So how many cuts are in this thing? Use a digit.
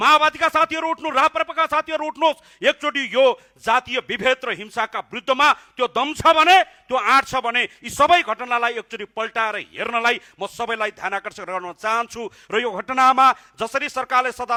0